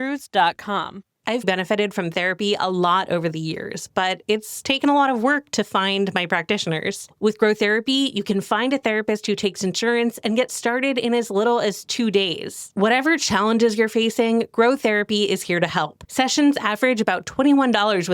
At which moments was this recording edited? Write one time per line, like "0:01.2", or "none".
0:01.5
0:07.1
0:12.7